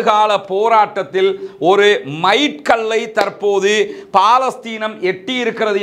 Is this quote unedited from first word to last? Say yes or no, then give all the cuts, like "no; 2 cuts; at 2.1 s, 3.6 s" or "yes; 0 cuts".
yes; 0 cuts